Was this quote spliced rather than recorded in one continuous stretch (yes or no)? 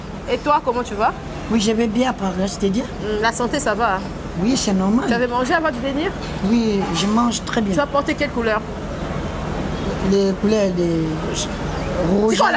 no